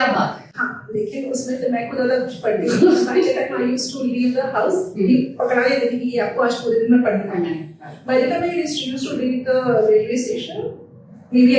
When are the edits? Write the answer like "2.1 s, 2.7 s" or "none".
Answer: none